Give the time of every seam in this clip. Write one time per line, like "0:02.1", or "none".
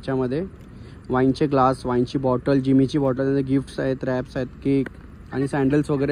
none